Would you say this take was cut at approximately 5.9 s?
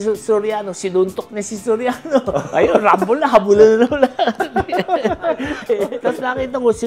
yes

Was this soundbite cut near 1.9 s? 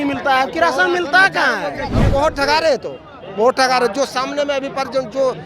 yes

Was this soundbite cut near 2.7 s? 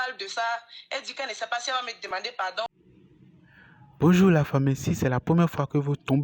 yes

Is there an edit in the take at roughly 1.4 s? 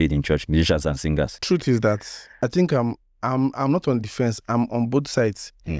yes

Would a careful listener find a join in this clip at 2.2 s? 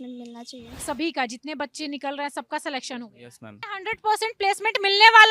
no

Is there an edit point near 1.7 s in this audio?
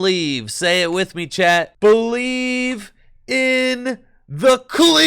yes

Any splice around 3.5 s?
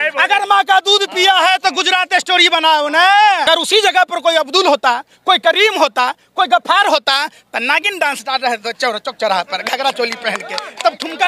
yes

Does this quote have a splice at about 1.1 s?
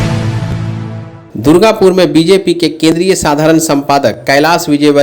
yes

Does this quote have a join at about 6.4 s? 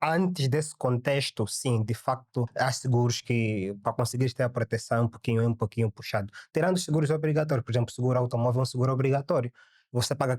no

